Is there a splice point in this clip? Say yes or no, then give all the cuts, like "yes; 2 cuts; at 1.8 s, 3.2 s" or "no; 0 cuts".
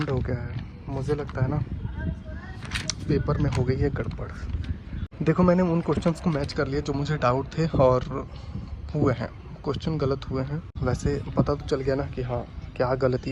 yes; 2 cuts; at 5.0 s, 10.7 s